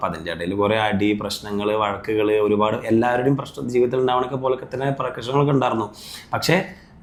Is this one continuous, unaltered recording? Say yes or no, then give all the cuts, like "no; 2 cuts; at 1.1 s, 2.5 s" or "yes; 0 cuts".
yes; 0 cuts